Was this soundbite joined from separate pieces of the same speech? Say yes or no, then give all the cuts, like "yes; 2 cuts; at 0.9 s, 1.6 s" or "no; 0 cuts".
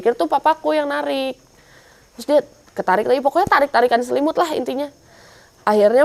no; 0 cuts